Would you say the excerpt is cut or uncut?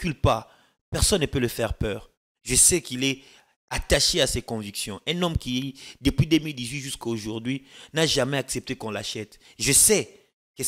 uncut